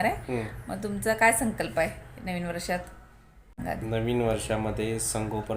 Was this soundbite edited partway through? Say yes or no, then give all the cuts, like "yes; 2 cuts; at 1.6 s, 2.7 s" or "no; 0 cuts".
yes; 1 cut; at 3.6 s